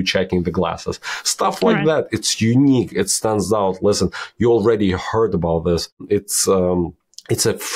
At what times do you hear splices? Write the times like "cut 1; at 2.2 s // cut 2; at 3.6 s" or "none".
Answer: none